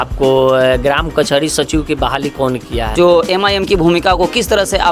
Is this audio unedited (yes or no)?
no